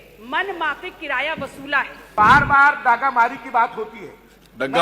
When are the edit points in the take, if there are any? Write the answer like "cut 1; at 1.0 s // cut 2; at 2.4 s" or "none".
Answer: cut 1; at 2.1 s